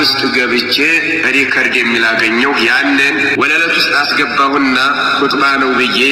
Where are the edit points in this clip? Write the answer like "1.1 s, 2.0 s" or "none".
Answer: 3.3 s